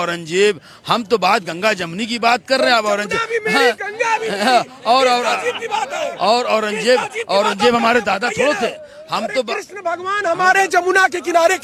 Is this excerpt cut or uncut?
uncut